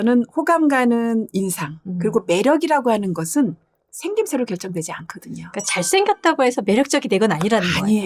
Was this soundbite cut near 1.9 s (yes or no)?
no